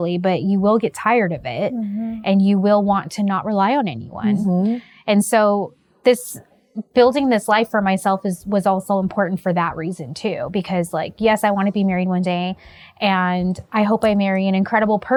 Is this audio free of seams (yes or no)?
yes